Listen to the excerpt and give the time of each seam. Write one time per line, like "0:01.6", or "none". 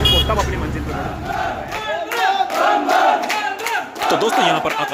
none